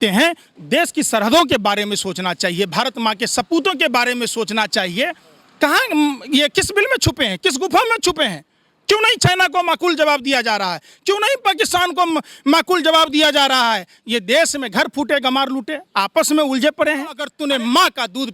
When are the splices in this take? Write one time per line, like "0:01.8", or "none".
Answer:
0:17.2